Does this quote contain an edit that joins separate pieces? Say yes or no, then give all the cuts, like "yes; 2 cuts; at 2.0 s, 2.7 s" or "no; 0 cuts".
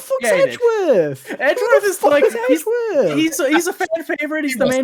no; 0 cuts